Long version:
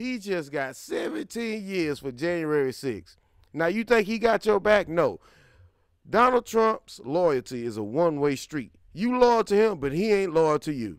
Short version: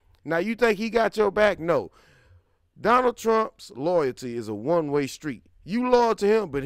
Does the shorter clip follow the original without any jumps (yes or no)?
yes